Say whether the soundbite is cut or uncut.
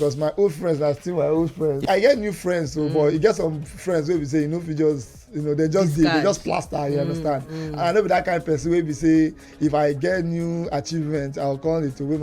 cut